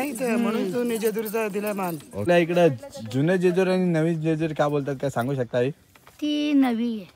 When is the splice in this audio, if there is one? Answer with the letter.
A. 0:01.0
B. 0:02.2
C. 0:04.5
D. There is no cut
B